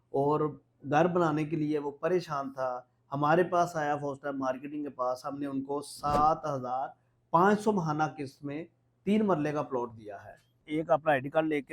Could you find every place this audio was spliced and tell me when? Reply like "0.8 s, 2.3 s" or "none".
10.7 s